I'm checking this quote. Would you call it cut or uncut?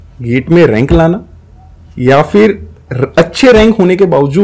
uncut